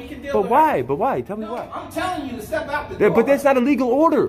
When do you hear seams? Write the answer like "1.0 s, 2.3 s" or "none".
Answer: 1.5 s

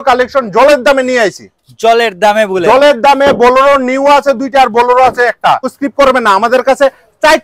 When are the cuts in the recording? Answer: 5.8 s

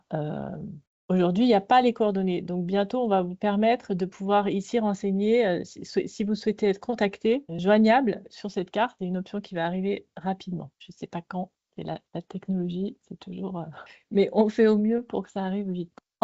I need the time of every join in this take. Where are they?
7.5 s, 9.0 s

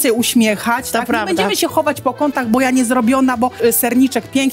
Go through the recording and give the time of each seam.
3.5 s

